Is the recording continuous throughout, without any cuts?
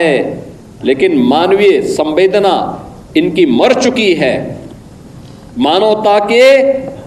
yes; 0 cuts

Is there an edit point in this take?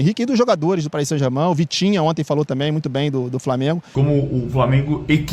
yes; 1 cut; at 3.9 s

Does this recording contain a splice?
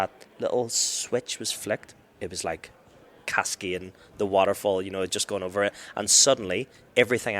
yes; 1 cut; at 2.0 s

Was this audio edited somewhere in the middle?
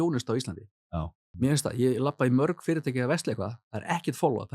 yes; 1 cut; at 1.2 s

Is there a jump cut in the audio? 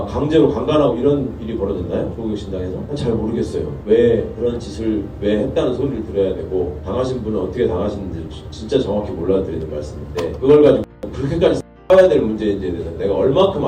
no; 0 cuts

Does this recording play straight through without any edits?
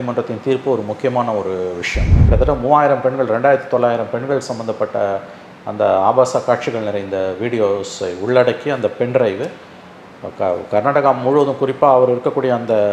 no; 1 cut; at 2.2 s

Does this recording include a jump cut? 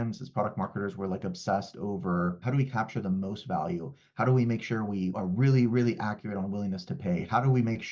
yes; 2 cuts; at 2.4 s, 5.2 s

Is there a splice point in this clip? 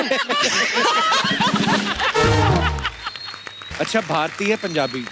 yes; 1 cut; at 3.6 s

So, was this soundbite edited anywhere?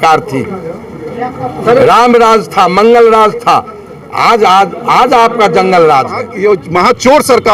yes; 1 cut; at 6.3 s

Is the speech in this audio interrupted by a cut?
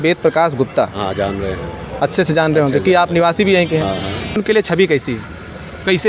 yes; 1 cut; at 4.4 s

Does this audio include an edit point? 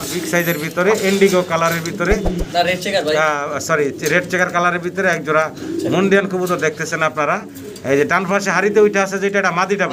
no; 0 cuts

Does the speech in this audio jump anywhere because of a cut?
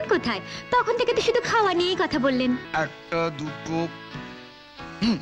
yes; 1 cut; at 2.7 s

